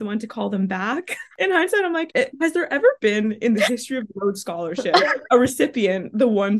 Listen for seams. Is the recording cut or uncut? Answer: cut